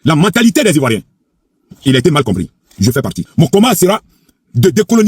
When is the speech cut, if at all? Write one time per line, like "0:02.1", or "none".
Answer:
0:03.2